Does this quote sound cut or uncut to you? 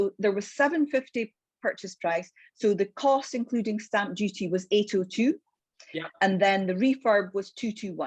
uncut